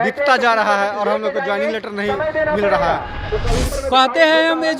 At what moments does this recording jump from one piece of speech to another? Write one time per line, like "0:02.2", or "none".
0:03.2